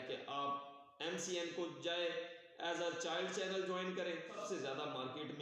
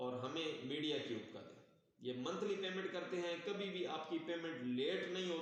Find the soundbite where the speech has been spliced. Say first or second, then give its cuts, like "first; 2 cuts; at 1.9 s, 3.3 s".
first; 1 cut; at 4.4 s